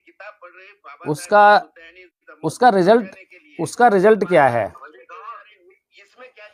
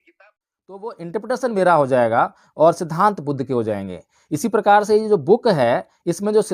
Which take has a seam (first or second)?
second